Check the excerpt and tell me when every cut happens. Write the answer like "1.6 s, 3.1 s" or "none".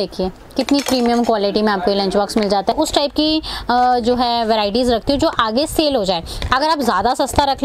2.7 s

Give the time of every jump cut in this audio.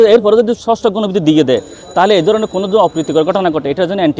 none

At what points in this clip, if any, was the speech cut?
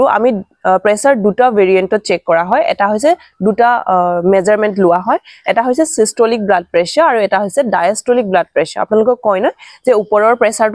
none

